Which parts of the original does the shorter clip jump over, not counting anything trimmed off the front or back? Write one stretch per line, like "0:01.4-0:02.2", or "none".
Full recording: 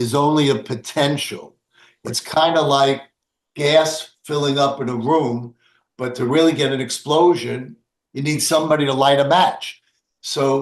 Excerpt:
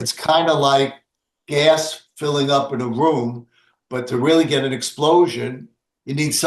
none